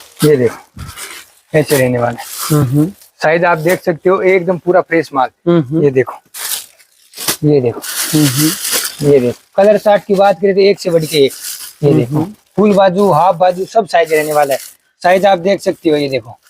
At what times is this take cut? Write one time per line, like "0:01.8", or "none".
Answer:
none